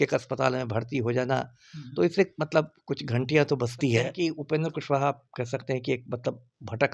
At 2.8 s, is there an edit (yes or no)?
no